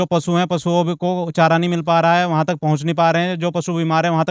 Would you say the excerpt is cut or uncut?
uncut